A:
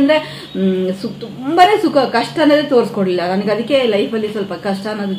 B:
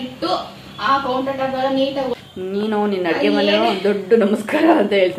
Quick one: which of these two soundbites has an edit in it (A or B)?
B